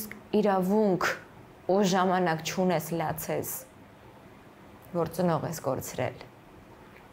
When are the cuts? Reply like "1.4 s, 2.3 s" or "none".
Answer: none